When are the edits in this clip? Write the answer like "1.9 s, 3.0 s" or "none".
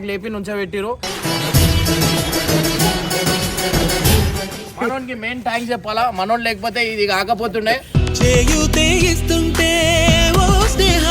4.5 s